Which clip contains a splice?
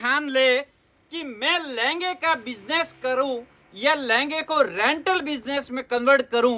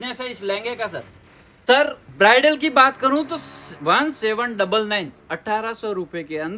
second; 1 cut; at 1.5 s

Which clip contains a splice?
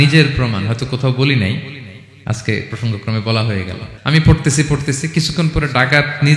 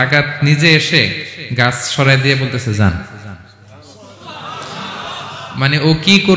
first; 1 cut; at 3.8 s

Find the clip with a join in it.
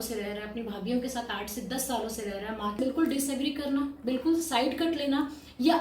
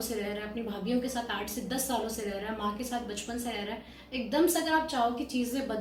first; 1 cut; at 2.8 s

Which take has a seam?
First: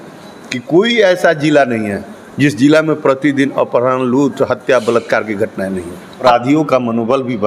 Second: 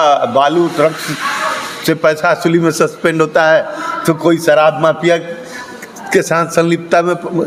first; 1 cut; at 6.2 s

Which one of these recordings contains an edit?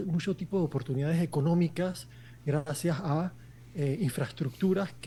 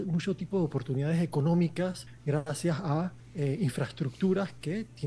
second; 2 cuts; at 2.1 s, 3.2 s

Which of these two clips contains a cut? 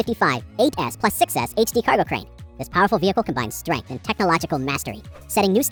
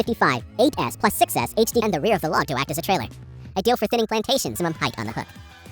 second; 2 cuts; at 1.8 s, 4.5 s

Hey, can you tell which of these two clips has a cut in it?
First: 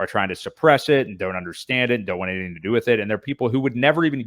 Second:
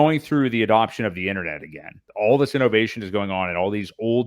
second; 1 cut; at 2.0 s

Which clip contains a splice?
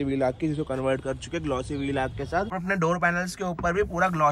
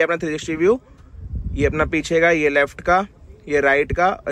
first; 1 cut; at 2.6 s

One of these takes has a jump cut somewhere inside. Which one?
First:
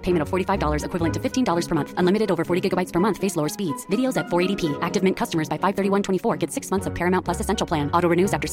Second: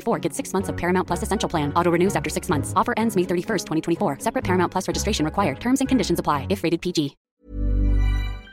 second; 1 cut; at 7.2 s

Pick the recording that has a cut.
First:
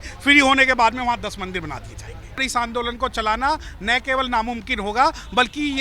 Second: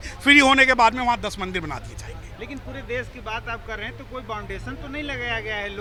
first; 1 cut; at 2.4 s

